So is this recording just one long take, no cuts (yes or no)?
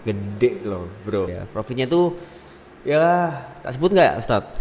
no